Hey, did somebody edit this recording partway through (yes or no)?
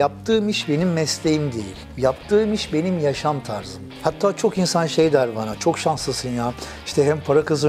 no